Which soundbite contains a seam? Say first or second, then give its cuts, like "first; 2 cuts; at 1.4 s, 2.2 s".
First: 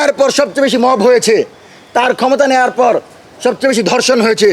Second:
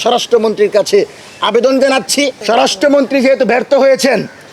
second; 1 cut; at 2.4 s